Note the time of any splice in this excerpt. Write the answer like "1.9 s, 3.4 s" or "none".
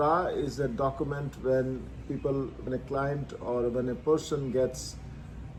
none